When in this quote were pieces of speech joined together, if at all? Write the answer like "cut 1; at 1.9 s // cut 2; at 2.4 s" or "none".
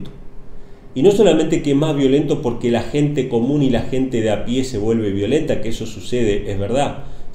none